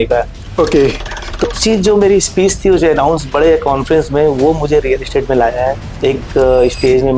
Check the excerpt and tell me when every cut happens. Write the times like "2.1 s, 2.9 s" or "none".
1.4 s, 5.9 s